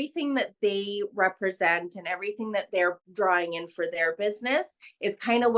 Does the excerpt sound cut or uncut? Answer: uncut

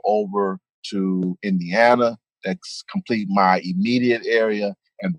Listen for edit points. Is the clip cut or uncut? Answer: uncut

